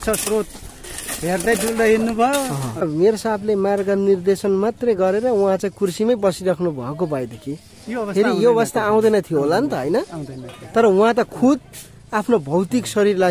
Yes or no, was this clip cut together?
yes